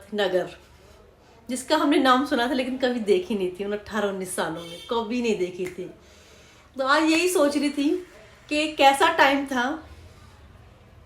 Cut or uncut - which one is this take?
uncut